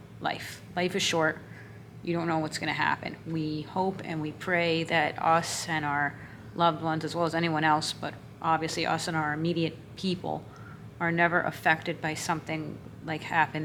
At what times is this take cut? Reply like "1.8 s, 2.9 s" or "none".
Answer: none